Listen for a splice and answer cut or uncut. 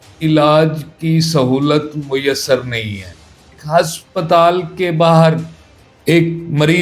cut